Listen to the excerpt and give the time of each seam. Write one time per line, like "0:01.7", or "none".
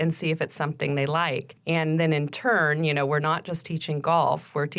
0:01.5